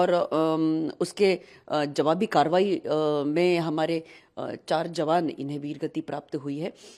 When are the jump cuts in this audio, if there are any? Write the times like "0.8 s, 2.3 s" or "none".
none